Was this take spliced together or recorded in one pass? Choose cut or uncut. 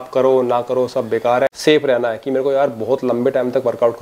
cut